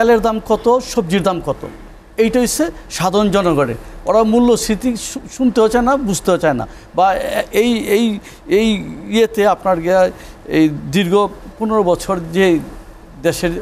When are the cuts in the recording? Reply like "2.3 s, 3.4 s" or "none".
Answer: none